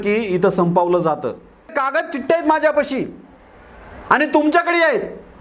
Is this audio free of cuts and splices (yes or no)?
no